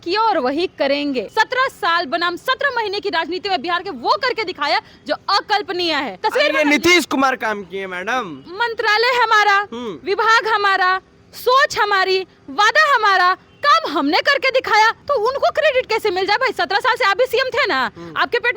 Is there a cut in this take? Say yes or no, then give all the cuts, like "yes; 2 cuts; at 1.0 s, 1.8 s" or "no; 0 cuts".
yes; 4 cuts; at 1.3 s, 6.2 s, 8.4 s, 15.0 s